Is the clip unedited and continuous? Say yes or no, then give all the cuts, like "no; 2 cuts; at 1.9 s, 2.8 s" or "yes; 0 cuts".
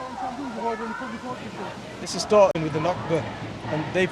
no; 1 cut; at 2.1 s